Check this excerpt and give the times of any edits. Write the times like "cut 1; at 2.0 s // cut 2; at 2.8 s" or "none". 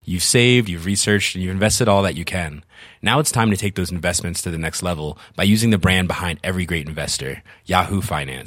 none